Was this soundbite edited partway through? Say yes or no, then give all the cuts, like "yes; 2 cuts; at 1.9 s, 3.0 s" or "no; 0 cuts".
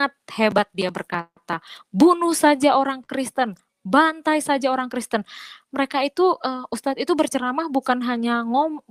no; 0 cuts